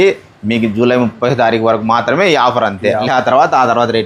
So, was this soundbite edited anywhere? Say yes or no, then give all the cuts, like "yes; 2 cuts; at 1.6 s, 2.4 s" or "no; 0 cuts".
yes; 2 cuts; at 1.1 s, 3.1 s